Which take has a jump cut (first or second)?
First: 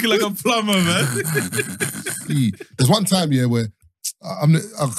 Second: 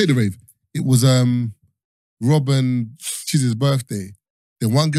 first